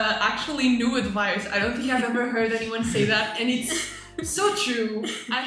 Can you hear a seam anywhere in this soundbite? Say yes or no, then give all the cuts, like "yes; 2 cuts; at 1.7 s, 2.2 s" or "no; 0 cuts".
no; 0 cuts